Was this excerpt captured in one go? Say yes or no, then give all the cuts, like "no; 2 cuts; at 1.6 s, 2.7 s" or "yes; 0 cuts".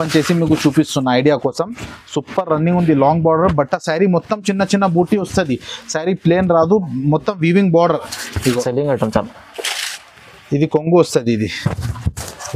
no; 1 cut; at 8.4 s